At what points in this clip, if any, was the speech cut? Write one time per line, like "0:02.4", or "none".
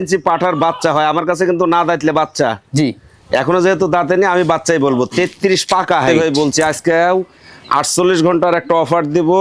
0:06.1